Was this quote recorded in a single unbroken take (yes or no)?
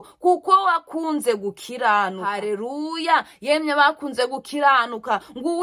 no